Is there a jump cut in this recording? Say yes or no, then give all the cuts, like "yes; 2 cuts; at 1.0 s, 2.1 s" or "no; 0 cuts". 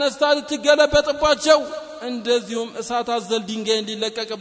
no; 0 cuts